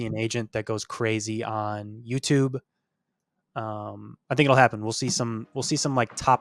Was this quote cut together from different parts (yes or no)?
no